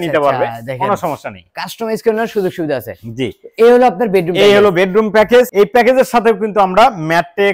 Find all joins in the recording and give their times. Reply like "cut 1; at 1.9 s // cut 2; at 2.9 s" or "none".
none

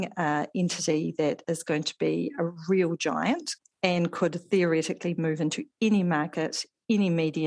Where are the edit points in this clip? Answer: cut 1; at 3.5 s

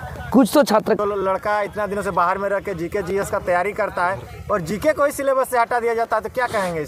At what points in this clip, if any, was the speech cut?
cut 1; at 1.0 s

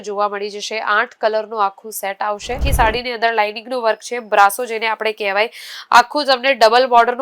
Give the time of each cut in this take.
cut 1; at 2.6 s

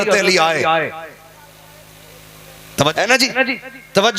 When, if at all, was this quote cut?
cut 1; at 2.9 s

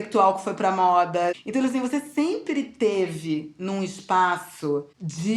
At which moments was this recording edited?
cut 1; at 1.4 s

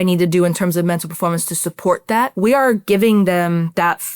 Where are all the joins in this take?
cut 1; at 2.3 s

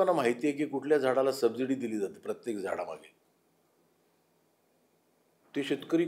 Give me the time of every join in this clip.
none

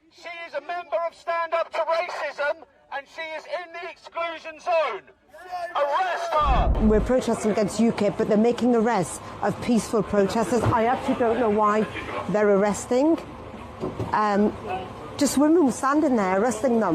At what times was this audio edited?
cut 1; at 6.7 s

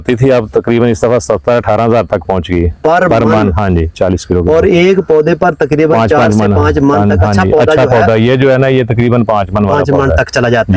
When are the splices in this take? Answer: none

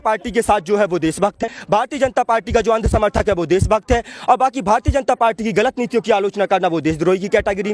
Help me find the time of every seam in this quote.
cut 1; at 1.4 s

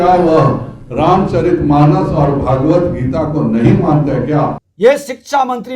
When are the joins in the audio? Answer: cut 1; at 4.6 s

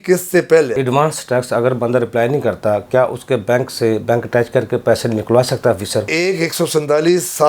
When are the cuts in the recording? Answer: cut 1; at 0.8 s // cut 2; at 6.1 s

